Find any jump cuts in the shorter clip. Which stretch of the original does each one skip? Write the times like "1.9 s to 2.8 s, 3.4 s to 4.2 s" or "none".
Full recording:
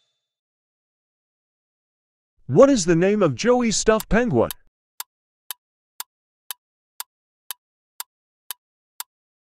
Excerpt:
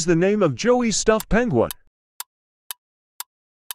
none